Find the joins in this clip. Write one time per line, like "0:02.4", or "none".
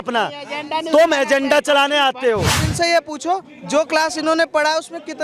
0:02.7